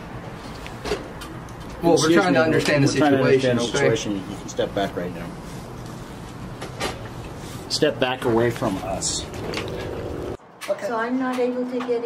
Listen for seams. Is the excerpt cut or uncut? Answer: cut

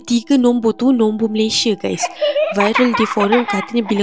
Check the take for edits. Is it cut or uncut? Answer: uncut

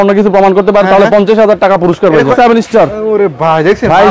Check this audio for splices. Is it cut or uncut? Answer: cut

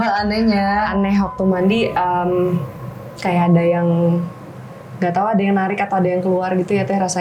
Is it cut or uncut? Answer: uncut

